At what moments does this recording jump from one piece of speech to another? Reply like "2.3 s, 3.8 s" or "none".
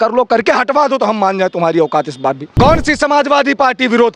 2.5 s